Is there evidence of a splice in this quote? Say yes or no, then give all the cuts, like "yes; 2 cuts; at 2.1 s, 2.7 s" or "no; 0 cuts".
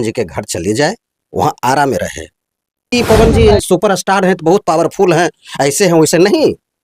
yes; 1 cut; at 2.9 s